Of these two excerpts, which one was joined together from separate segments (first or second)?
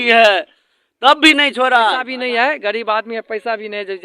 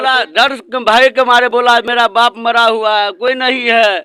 first